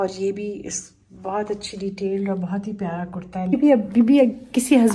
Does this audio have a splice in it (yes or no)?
yes